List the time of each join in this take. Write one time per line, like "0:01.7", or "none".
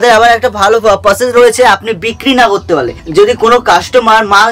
none